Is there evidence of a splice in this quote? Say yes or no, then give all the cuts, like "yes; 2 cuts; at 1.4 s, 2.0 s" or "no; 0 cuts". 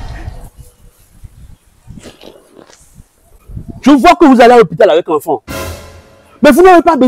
yes; 1 cut; at 1.9 s